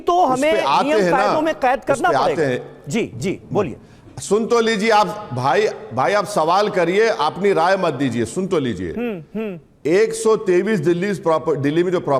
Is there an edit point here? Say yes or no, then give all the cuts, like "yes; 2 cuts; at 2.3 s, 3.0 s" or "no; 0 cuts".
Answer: no; 0 cuts